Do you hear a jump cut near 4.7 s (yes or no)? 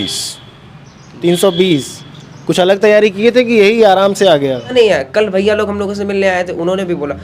yes